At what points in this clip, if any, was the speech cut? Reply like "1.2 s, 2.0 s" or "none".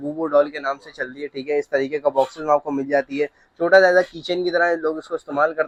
none